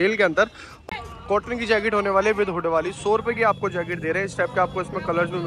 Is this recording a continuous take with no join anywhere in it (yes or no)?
no